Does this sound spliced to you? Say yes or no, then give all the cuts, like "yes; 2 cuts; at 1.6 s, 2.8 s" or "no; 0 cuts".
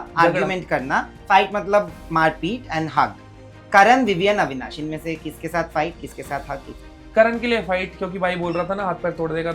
yes; 1 cut; at 6.7 s